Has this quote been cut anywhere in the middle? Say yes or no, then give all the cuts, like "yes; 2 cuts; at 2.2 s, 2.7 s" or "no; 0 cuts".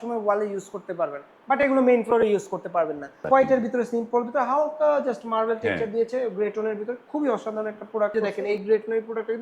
yes; 2 cuts; at 3.1 s, 8.1 s